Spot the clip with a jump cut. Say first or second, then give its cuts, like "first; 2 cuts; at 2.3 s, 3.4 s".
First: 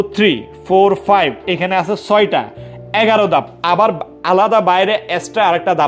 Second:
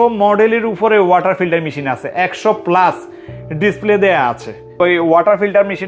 second; 1 cut; at 4.7 s